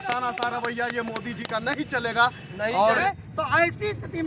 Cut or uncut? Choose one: cut